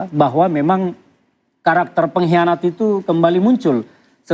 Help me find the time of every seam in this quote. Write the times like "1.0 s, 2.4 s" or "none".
none